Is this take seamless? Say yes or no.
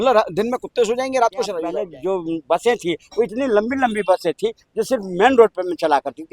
no